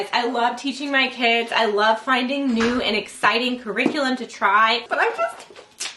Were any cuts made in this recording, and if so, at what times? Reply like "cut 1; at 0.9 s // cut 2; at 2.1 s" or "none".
cut 1; at 4.8 s